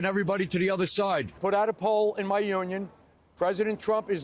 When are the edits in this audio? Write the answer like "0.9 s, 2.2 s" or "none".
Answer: 1.4 s